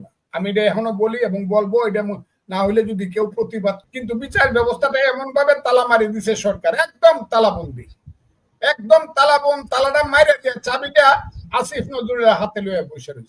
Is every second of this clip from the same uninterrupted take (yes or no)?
no